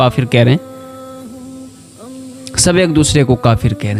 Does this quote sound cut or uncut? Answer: uncut